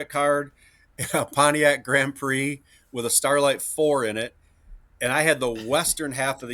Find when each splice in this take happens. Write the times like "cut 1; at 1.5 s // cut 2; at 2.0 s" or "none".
none